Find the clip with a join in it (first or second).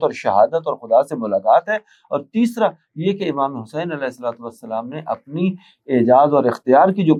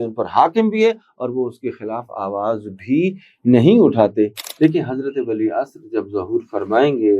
second